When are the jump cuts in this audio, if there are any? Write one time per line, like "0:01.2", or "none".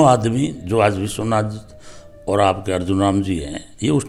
none